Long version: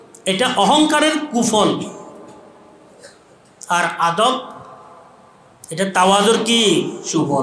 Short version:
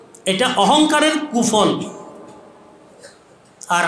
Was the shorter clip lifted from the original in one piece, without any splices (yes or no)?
yes